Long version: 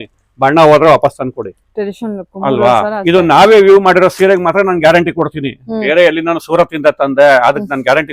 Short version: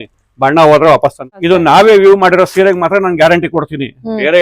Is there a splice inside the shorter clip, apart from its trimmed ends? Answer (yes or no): yes